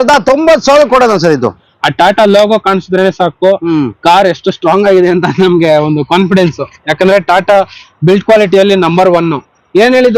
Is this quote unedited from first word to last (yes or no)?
no